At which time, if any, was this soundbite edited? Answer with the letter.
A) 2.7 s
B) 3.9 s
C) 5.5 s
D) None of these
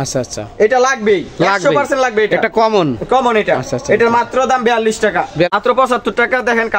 C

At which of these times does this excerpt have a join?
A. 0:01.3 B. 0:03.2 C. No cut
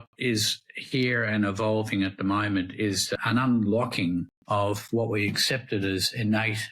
B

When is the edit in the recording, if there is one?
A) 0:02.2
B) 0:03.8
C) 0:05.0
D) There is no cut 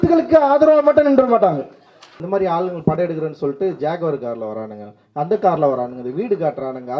A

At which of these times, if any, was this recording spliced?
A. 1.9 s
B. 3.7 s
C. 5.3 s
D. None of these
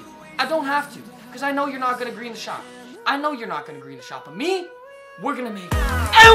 D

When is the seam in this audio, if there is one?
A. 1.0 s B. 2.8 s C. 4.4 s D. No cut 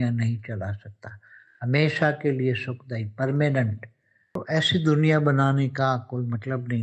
C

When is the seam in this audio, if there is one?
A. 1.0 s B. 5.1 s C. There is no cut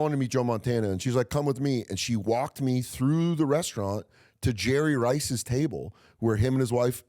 A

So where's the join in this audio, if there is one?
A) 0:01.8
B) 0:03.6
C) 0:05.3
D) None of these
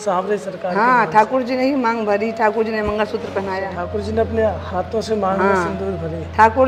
D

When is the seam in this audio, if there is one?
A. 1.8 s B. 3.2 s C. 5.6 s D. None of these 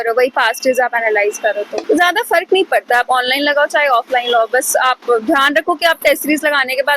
A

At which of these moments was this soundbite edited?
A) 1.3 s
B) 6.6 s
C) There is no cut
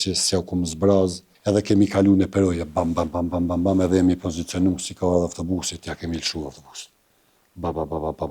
A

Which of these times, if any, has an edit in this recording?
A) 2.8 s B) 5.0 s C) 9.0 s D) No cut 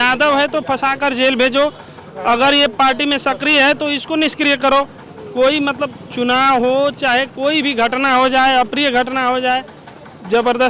D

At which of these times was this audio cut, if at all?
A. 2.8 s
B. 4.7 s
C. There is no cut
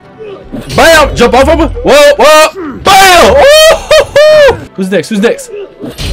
B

